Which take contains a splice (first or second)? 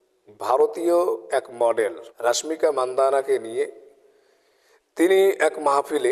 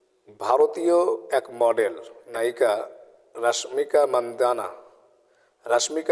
first